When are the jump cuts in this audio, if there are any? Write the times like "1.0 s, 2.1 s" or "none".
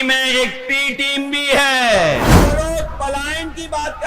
2.4 s